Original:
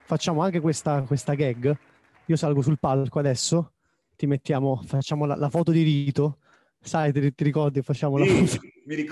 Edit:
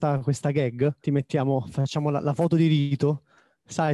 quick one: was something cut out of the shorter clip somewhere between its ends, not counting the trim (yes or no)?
yes